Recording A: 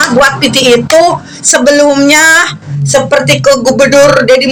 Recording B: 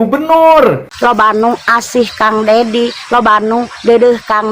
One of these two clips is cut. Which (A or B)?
B